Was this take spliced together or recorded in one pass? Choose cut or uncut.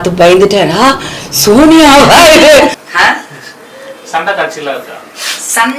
cut